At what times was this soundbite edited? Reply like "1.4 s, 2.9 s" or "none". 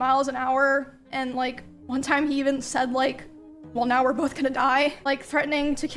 none